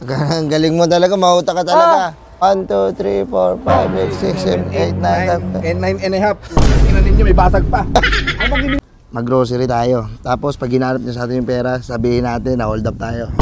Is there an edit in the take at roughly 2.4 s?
yes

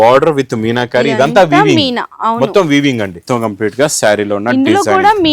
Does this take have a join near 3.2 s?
yes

